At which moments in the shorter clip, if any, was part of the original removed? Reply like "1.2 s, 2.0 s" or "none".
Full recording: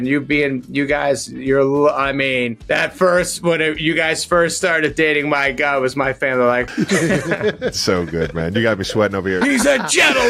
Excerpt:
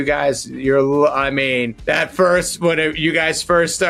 none